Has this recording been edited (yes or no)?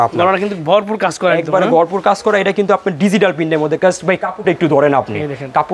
no